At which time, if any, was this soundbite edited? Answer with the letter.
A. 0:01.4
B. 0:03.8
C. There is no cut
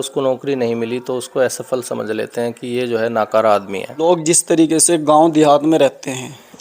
B